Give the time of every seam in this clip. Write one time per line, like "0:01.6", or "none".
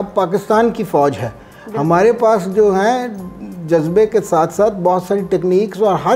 none